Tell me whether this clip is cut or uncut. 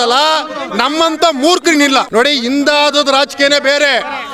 cut